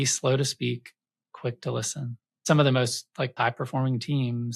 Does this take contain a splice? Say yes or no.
yes